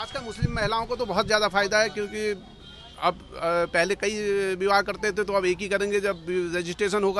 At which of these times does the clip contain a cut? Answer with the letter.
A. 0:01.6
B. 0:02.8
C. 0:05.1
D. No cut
D